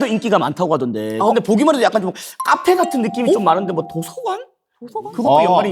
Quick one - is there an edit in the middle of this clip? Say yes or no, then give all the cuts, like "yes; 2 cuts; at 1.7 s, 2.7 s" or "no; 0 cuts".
no; 0 cuts